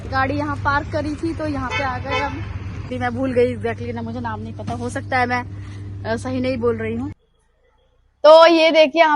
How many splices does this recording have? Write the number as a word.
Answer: two